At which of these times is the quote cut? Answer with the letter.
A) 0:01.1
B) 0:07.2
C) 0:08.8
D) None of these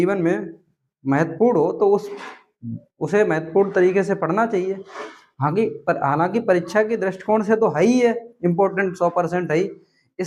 D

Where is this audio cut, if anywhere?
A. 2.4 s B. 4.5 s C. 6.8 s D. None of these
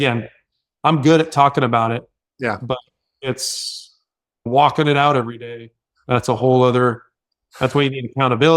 B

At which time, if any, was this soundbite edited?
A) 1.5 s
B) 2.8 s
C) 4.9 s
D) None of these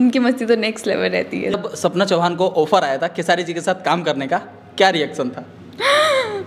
A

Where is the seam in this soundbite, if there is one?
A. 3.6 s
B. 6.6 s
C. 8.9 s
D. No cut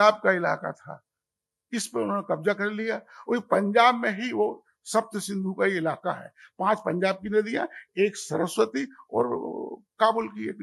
D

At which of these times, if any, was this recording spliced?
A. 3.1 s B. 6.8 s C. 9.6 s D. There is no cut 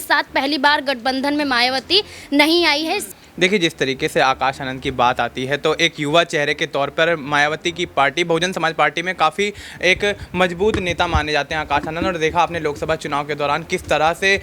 A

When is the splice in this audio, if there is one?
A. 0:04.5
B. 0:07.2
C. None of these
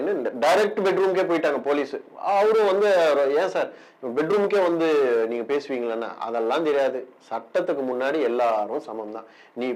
C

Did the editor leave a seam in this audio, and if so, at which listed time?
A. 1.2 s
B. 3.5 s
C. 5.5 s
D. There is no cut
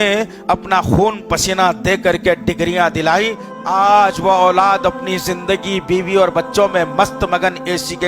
B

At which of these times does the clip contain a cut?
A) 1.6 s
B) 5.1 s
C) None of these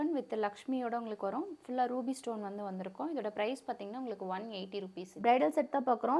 B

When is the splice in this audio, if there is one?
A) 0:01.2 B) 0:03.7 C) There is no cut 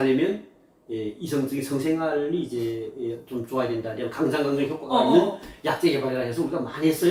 C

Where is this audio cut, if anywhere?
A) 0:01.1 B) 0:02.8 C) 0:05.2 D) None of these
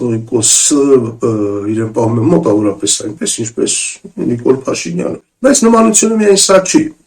C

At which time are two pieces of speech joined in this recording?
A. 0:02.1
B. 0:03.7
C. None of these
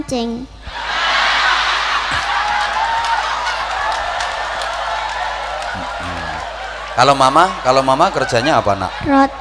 C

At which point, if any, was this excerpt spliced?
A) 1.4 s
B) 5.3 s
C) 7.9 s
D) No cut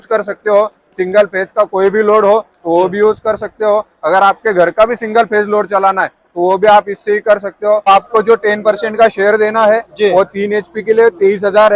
C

